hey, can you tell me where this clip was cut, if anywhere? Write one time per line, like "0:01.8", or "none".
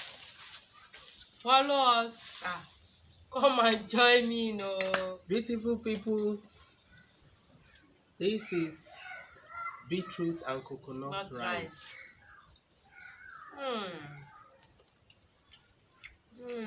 none

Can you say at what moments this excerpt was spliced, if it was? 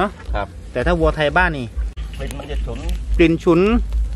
0:01.8

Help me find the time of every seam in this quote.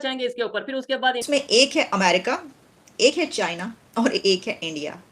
0:01.2

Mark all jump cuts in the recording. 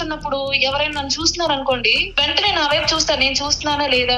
0:02.0

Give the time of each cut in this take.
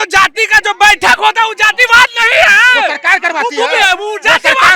none

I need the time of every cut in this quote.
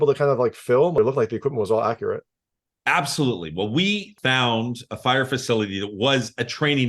0:01.0
0:04.1

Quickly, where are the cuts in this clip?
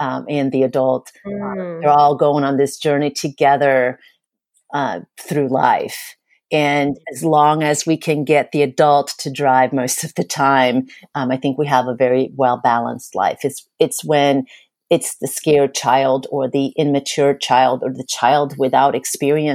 0:04.1

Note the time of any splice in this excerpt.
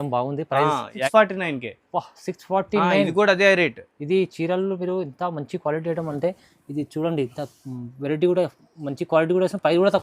0:01.1

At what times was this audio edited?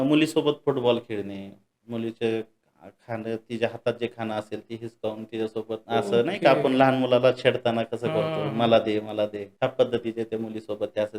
0:05.8
0:09.4

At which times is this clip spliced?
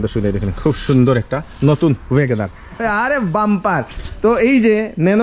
0:02.8

